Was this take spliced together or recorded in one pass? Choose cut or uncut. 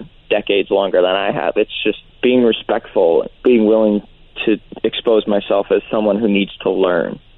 cut